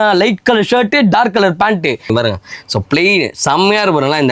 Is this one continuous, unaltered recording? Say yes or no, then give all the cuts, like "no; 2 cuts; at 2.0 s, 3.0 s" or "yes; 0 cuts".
no; 1 cut; at 2.1 s